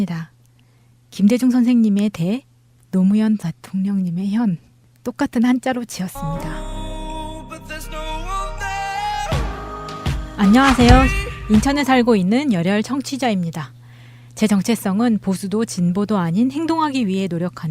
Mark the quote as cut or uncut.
cut